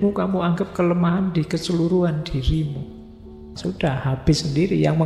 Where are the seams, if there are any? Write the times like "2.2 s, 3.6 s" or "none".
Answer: 3.5 s